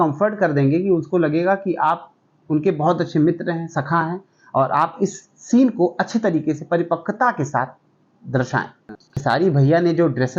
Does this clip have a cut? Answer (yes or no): yes